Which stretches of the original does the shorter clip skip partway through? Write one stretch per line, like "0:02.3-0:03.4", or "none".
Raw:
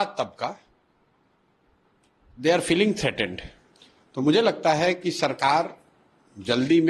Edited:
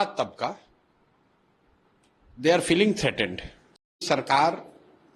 0:04.0-0:05.1